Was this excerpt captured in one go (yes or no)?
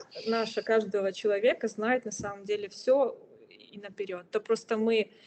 yes